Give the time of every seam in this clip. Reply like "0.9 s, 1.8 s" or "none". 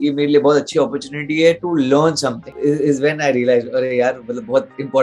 2.5 s